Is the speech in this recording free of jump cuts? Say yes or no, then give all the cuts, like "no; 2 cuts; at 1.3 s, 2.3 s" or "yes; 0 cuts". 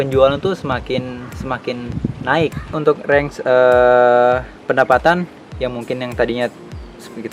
no; 1 cut; at 2.7 s